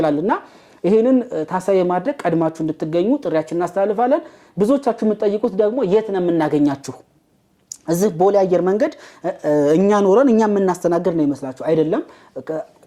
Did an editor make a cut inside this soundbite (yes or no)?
no